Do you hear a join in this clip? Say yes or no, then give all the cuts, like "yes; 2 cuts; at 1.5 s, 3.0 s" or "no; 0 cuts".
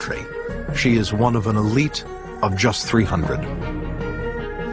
yes; 1 cut; at 2.0 s